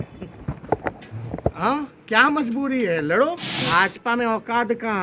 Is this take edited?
yes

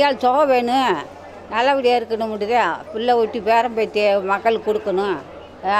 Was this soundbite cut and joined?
no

